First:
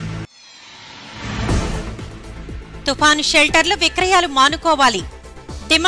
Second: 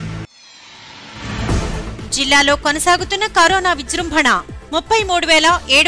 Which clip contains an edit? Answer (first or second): first